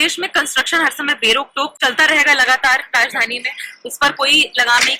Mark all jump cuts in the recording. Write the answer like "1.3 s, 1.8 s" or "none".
1.8 s